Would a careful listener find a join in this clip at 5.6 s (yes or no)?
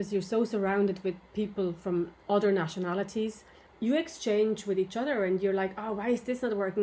no